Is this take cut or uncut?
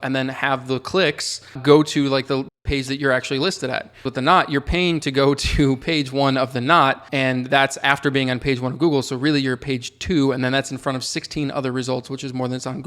cut